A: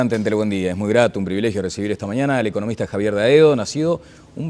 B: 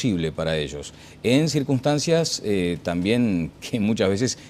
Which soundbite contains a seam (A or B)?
B